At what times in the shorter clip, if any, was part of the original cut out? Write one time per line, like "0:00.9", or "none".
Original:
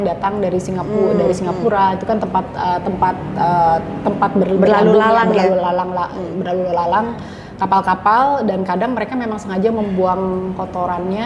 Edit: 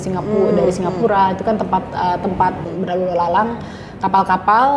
0:02.6